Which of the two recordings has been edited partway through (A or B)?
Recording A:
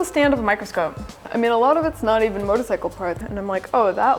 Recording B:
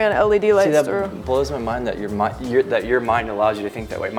A